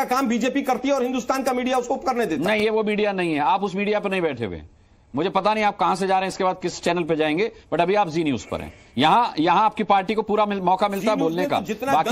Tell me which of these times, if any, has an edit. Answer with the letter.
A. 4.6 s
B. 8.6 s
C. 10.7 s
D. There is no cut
D